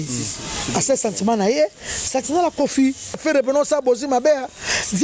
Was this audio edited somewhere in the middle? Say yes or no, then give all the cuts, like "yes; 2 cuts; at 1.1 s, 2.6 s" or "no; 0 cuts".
yes; 1 cut; at 3.2 s